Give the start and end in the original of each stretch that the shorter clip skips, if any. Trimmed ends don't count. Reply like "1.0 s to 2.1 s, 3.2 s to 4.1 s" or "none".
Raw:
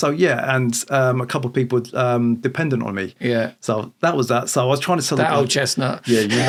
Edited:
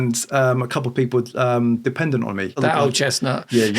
3.1 s to 5.1 s